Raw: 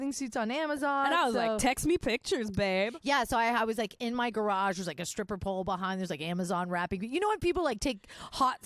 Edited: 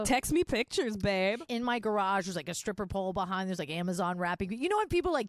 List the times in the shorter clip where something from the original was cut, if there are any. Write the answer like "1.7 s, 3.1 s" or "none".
1.4 s

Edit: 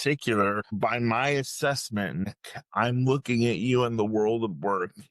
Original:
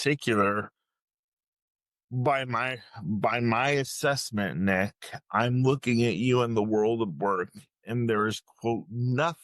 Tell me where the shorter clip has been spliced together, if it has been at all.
0.7 s, 2.2 s

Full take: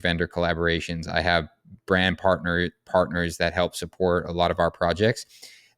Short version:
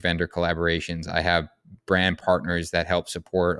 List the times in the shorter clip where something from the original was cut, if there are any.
2.2 s

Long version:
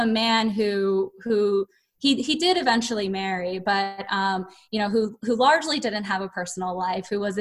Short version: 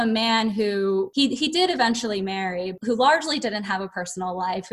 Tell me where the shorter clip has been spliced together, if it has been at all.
1.1 s, 2.7 s

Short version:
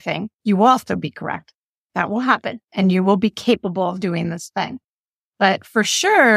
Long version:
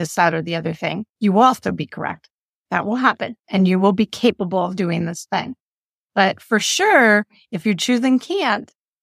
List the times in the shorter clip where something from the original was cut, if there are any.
none

